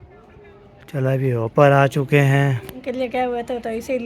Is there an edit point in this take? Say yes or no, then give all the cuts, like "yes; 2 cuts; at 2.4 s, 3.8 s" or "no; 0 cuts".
yes; 1 cut; at 3.1 s